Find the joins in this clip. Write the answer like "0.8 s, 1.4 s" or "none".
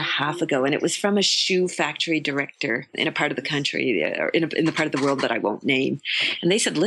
none